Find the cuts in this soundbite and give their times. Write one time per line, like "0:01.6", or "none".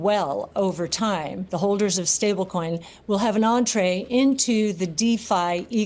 0:01.4